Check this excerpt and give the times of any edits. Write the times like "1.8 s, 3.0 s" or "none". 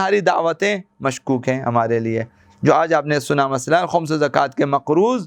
none

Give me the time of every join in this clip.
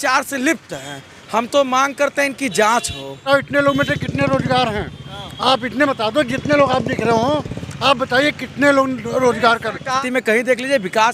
3.2 s, 10.0 s

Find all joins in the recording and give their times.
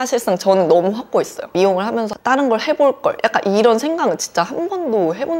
1.4 s, 2.1 s

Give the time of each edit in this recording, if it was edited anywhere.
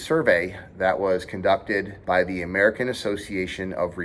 1.9 s

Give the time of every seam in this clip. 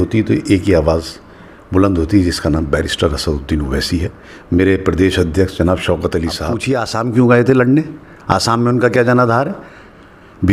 6.5 s

